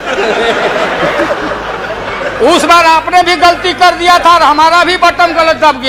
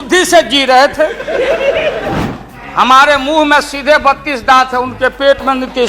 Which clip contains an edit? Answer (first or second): second